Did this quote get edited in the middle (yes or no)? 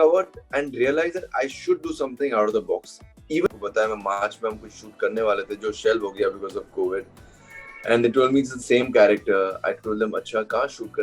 yes